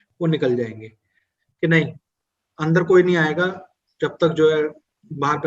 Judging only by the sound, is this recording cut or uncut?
cut